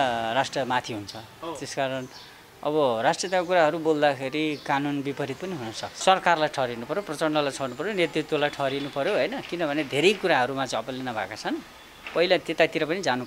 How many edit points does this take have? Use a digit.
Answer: 1